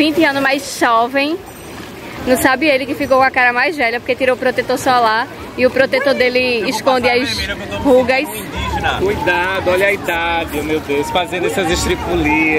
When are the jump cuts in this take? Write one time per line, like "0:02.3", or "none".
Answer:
none